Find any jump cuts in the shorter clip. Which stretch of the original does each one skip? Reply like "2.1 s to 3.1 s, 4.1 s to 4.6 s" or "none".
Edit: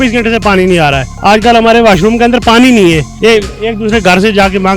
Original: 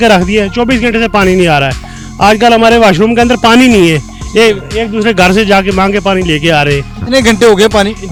1.8 s to 2.0 s, 4.1 s to 4.2 s